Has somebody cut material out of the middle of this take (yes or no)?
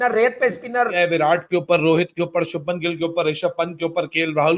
yes